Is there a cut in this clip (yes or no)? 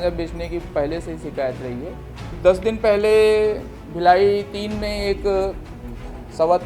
yes